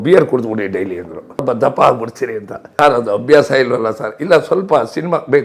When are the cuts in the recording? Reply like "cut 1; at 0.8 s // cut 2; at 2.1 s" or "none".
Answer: cut 1; at 1.4 s // cut 2; at 2.6 s